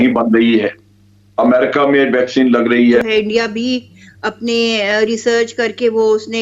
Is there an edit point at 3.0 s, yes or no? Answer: yes